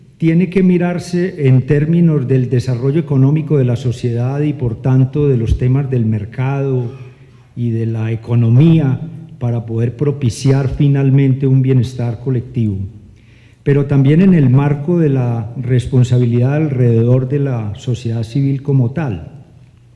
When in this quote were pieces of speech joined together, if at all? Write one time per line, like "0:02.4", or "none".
0:02.2